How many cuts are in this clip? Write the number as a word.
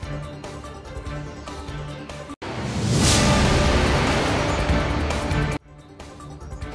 one